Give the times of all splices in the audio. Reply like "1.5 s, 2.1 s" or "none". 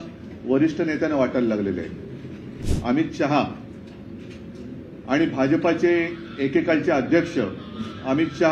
2.7 s